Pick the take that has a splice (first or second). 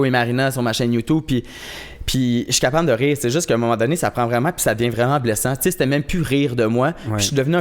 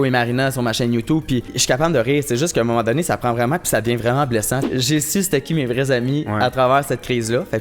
second